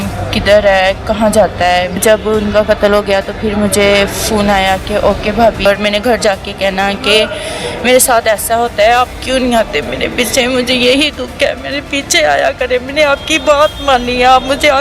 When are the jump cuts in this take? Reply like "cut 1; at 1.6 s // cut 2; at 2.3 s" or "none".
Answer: cut 1; at 5.6 s